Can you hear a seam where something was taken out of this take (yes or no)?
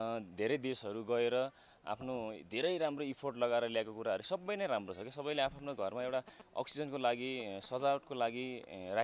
no